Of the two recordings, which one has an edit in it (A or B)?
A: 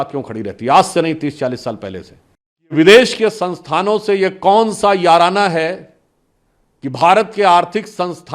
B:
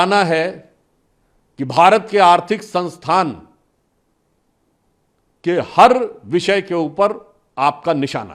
A